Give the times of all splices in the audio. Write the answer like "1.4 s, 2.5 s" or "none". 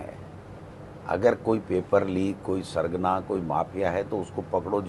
none